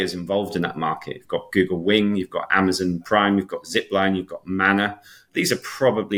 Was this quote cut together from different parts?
no; 0 cuts

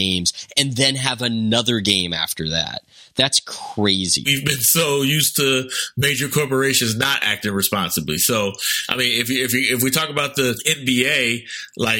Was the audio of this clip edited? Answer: yes; 2 cuts; at 4.4 s, 10.7 s

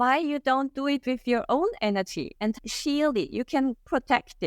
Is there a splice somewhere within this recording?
yes; 1 cut; at 2.6 s

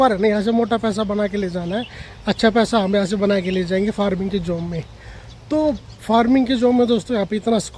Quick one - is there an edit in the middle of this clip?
no; 0 cuts

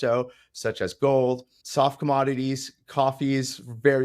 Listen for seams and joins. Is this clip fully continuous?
no; 1 cut; at 1.5 s

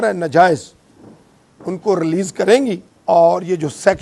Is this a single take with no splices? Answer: no; 1 cut; at 2.9 s

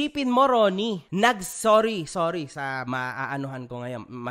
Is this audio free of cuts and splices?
no; 1 cut; at 1.0 s

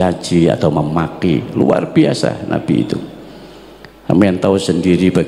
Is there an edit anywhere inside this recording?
no; 0 cuts

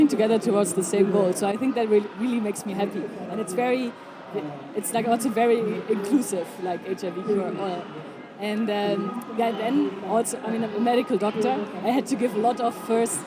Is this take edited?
no; 0 cuts

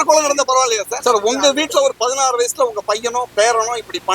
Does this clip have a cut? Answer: yes; 1 cut; at 0.9 s

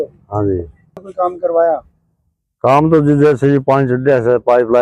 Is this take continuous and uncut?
no; 1 cut; at 1.0 s

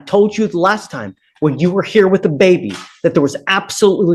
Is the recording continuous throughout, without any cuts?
yes; 0 cuts

